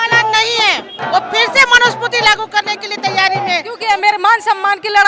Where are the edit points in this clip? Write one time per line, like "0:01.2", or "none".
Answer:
0:00.9
0:03.7